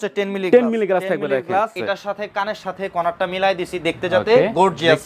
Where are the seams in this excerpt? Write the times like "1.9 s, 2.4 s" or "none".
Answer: 1.8 s